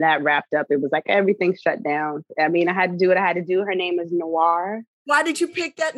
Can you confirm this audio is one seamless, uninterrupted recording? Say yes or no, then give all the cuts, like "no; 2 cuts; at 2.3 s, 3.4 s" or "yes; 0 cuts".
no; 2 cuts; at 2.3 s, 5.0 s